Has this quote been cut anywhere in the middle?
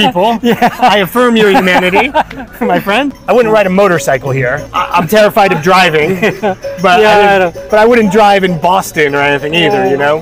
yes; 2 cuts; at 3.1 s, 4.7 s

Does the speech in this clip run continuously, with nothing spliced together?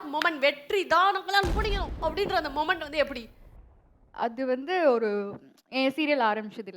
yes; 0 cuts

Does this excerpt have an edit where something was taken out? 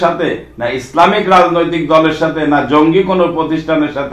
no; 0 cuts

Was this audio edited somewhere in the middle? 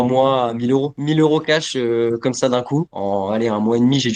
yes; 1 cut; at 2.9 s

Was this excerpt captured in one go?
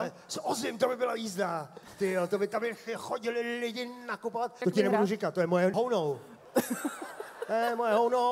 no; 2 cuts; at 4.6 s, 5.7 s

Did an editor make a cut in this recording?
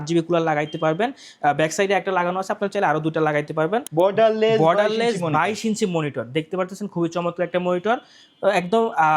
yes; 1 cut; at 3.9 s

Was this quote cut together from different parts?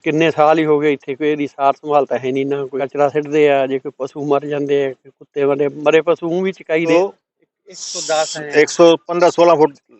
yes; 2 cuts; at 2.8 s, 6.9 s

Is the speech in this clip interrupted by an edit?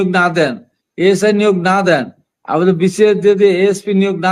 no; 0 cuts

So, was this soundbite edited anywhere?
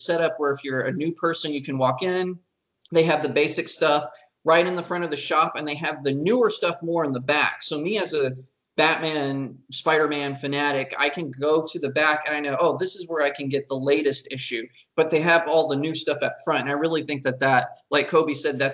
no; 0 cuts

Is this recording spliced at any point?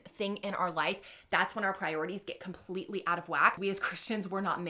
yes; 1 cut; at 3.6 s

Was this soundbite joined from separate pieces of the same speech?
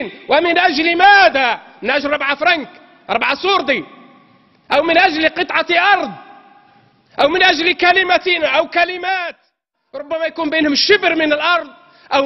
yes; 1 cut; at 10.0 s

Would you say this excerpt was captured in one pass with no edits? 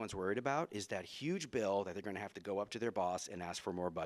yes; 0 cuts

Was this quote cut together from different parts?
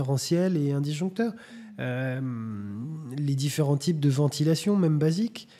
no; 0 cuts

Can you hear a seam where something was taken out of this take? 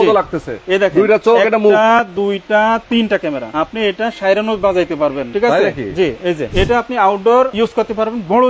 yes; 4 cuts; at 3.4 s, 5.2 s, 6.5 s, 7.5 s

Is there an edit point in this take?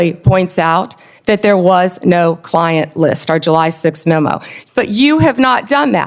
yes; 1 cut; at 4.5 s

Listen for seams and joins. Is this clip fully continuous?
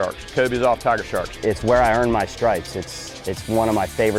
yes; 0 cuts

